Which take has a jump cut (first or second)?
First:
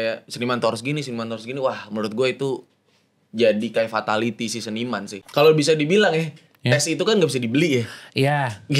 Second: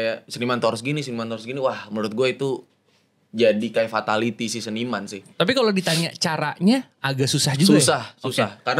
first